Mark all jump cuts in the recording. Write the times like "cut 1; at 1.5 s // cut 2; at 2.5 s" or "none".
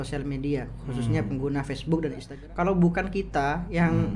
cut 1; at 2.3 s